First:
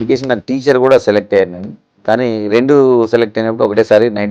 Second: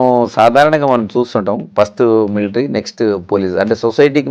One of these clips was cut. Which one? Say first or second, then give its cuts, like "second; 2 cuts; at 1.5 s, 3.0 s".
second; 1 cut; at 1.7 s